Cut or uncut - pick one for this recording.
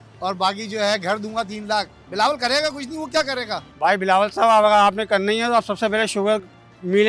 cut